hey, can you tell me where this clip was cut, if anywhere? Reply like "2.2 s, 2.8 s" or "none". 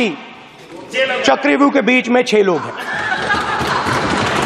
none